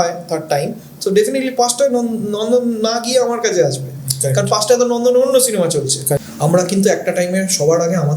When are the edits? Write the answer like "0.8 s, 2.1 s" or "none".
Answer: 6.2 s